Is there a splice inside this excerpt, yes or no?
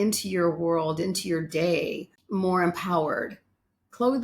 yes